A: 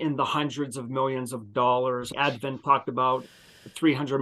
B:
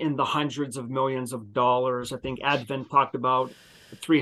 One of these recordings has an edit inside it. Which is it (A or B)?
A